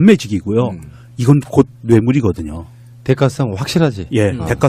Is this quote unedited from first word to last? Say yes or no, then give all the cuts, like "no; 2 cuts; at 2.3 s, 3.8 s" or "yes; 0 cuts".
yes; 0 cuts